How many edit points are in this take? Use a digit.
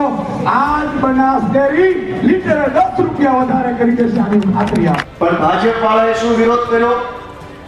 1